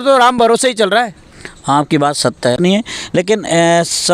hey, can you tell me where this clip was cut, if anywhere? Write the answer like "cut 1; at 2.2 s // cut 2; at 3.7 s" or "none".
cut 1; at 2.9 s